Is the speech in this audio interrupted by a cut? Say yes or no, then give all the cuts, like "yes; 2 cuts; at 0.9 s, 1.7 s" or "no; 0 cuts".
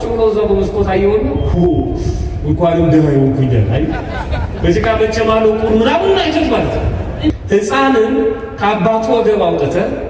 yes; 1 cut; at 7.3 s